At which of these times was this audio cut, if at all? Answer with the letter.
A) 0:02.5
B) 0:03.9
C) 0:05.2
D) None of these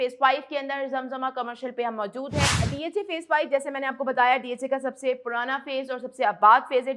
A